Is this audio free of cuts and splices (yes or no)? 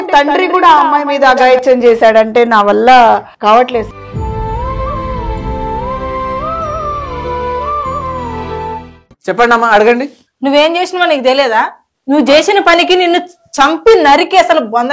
no